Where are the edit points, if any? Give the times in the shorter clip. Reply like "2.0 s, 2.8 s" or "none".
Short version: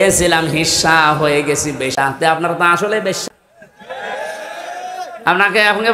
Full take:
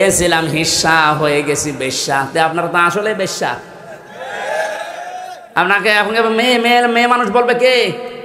1.9 s, 3.2 s